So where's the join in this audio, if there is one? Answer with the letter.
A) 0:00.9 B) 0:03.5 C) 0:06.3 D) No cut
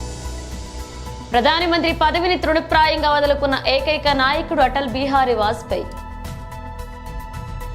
A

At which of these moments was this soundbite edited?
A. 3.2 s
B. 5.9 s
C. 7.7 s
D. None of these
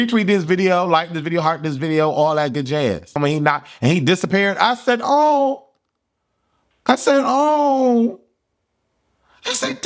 A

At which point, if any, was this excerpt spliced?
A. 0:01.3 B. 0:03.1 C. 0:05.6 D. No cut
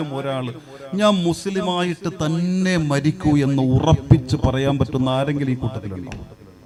D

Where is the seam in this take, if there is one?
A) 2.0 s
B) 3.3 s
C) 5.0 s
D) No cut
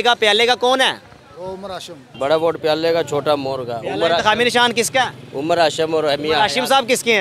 A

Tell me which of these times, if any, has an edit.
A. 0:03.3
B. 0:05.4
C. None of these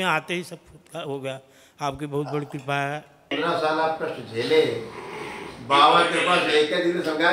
A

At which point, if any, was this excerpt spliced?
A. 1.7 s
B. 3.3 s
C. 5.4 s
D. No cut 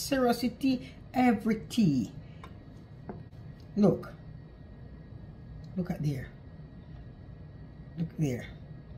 B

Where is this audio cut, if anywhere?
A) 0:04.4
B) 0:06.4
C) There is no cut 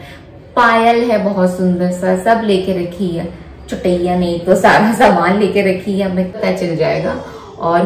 B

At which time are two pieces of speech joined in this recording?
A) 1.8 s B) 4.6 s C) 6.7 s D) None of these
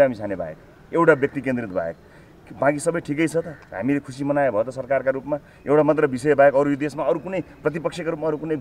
D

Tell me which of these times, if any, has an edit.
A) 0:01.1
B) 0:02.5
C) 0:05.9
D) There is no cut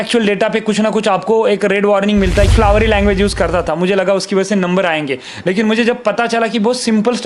B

